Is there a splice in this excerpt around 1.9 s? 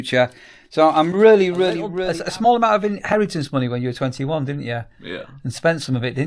yes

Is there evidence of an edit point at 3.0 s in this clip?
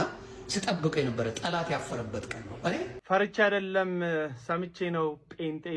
yes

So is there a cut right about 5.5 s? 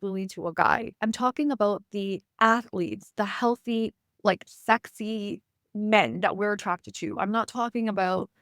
no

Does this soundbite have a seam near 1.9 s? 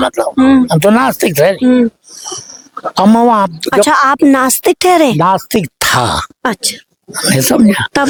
no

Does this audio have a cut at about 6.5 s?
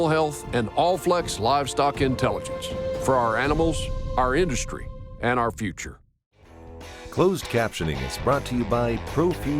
yes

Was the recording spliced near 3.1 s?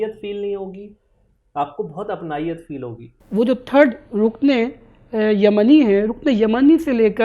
yes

